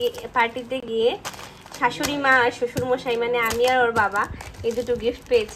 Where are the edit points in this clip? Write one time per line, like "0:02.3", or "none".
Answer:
none